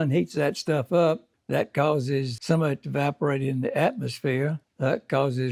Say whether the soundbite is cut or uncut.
uncut